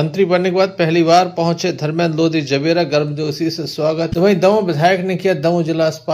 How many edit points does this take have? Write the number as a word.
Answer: zero